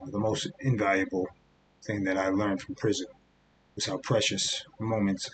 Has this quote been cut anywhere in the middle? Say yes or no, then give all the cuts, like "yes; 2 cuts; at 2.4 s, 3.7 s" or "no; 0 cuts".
no; 0 cuts